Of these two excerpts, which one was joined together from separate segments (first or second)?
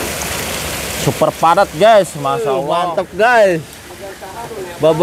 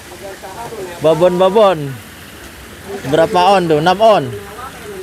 first